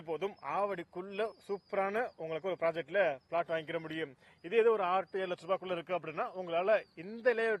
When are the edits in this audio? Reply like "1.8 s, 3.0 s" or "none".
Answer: none